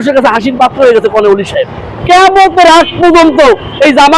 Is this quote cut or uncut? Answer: cut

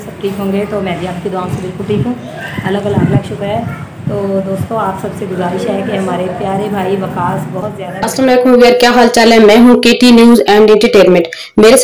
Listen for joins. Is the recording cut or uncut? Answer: cut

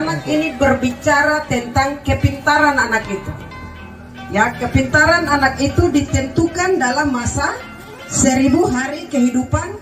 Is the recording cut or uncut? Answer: uncut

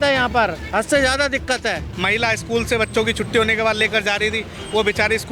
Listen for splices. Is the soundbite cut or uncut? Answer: cut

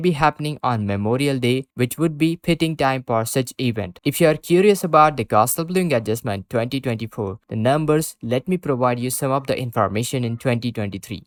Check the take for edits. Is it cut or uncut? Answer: uncut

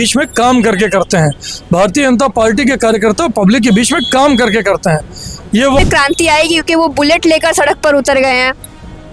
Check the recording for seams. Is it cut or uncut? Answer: cut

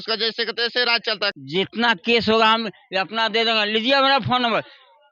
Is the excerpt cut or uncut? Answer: cut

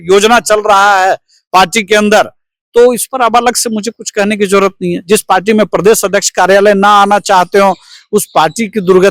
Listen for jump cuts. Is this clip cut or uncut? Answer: uncut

